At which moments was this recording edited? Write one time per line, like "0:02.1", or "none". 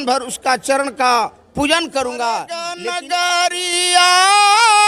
0:02.8